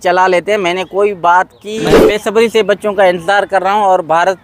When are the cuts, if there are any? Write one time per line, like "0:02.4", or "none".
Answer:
0:02.0